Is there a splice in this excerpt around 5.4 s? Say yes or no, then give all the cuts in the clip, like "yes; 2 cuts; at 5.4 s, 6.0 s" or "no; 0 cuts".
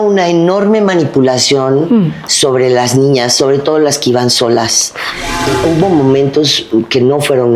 yes; 1 cut; at 5.4 s